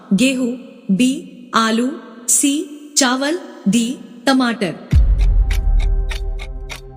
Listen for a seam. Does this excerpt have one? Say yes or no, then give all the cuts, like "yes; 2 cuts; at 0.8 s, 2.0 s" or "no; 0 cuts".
yes; 1 cut; at 4.9 s